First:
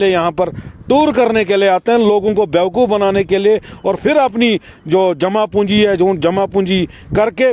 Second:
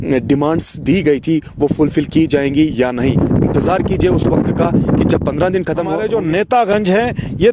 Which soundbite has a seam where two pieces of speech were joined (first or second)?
second